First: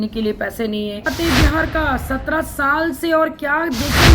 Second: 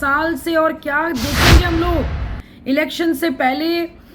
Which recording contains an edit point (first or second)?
first